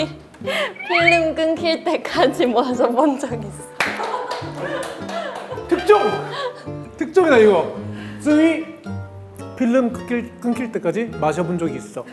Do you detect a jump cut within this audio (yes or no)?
no